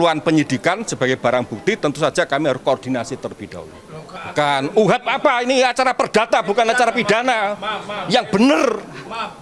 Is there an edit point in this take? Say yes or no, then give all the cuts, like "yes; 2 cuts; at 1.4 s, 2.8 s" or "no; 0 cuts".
yes; 1 cut; at 4.2 s